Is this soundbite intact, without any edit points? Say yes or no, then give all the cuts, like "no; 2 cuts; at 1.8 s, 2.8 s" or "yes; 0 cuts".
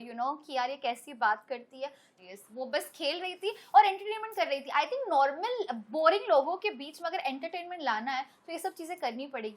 no; 1 cut; at 2.1 s